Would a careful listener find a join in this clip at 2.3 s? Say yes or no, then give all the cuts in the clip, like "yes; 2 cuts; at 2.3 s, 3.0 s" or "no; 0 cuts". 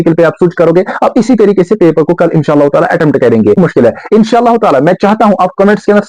no; 1 cut; at 3.6 s